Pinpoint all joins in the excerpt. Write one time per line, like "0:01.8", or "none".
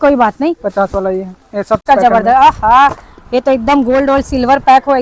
0:01.8